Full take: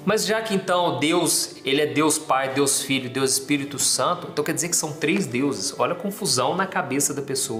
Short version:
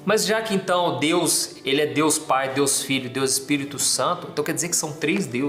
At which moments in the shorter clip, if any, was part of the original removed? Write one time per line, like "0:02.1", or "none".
none